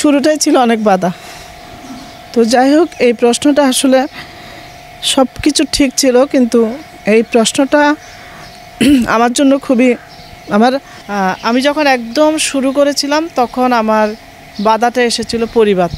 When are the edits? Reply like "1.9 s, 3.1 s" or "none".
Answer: none